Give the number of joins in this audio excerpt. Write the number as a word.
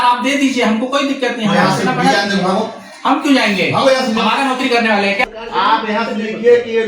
one